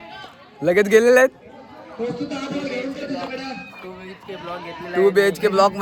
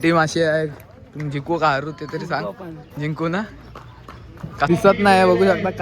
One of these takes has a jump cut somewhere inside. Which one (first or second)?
second